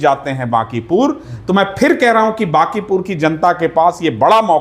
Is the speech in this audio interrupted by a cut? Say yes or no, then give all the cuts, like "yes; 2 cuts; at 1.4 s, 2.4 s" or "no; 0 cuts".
no; 0 cuts